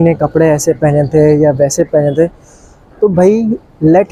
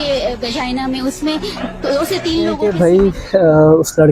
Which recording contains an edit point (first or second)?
second